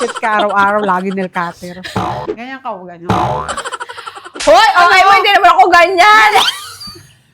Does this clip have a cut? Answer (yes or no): yes